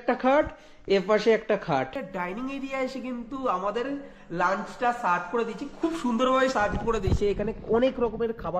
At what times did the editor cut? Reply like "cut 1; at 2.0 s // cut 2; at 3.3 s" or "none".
cut 1; at 2.0 s

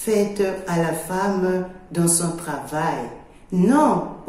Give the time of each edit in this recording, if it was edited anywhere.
cut 1; at 1.8 s

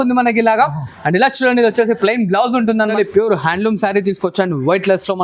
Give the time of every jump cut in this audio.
cut 1; at 2.9 s

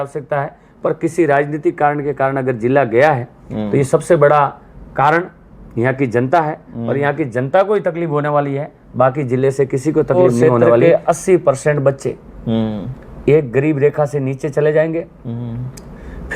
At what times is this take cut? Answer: cut 1; at 10.8 s

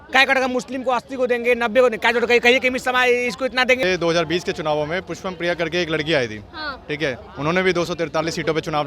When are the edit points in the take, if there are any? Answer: cut 1; at 3.8 s

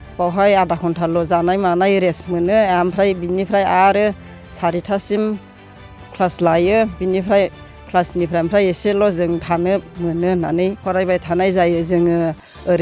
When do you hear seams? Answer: cut 1; at 10.8 s

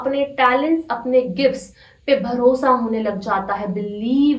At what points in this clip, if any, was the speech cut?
none

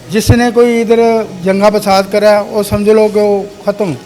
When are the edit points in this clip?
none

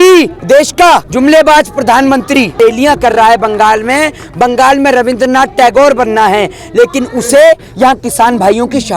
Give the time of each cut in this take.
cut 1; at 0.8 s // cut 2; at 2.5 s

